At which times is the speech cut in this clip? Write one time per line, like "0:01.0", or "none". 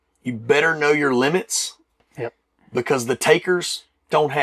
none